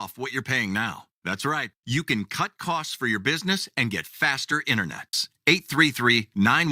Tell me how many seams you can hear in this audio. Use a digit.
1